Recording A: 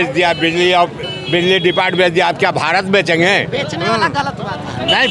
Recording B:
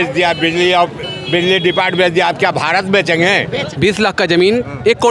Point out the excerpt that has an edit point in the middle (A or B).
B